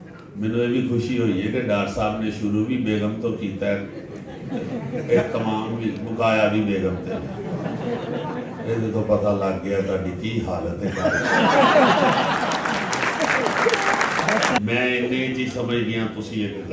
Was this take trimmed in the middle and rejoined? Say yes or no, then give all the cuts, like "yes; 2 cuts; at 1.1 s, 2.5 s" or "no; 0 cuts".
yes; 1 cut; at 14.6 s